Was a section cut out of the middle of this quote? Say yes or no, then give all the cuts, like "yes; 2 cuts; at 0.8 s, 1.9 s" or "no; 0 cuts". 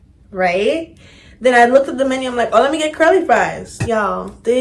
yes; 1 cut; at 3.7 s